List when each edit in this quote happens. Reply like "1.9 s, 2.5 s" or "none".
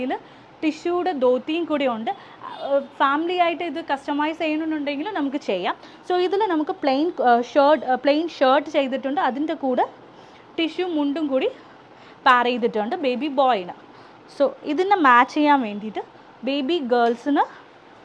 none